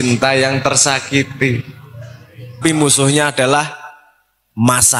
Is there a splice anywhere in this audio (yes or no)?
yes